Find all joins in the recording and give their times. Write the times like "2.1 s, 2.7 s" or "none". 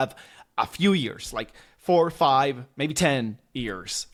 none